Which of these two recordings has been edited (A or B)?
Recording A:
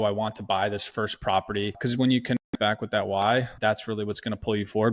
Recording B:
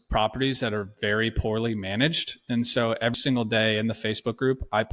A